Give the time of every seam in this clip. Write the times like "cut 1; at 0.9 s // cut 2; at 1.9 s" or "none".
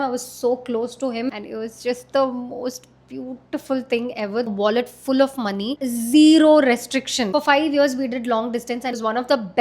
cut 1; at 1.3 s // cut 2; at 4.5 s // cut 3; at 5.8 s // cut 4; at 7.3 s // cut 5; at 8.8 s